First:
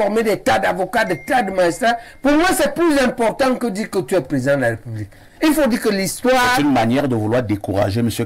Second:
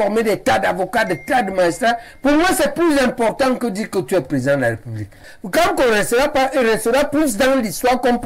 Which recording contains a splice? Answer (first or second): second